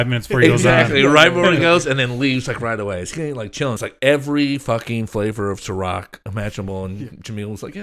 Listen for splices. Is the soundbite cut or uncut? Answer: cut